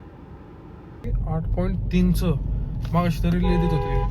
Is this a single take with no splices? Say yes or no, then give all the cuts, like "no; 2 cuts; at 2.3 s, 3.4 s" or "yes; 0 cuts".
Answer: no; 1 cut; at 1.0 s